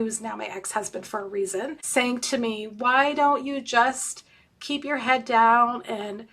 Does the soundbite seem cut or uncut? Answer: cut